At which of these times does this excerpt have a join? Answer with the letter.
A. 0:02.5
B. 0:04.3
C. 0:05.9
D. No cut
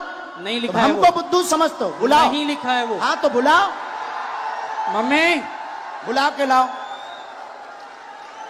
D